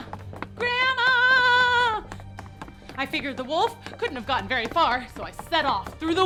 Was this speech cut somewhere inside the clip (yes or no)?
no